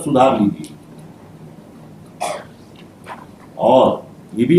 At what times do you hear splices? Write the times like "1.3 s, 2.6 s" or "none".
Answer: none